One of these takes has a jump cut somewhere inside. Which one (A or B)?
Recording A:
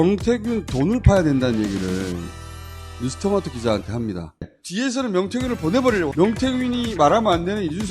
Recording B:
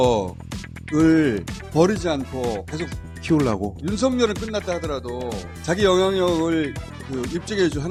A